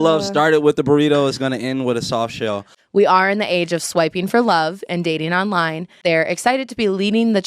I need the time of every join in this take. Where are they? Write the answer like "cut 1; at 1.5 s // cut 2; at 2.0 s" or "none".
cut 1; at 2.7 s // cut 2; at 5.9 s